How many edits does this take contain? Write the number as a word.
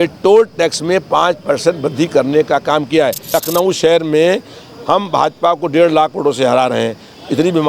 one